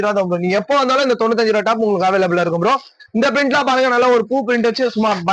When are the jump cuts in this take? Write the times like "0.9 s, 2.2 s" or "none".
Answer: none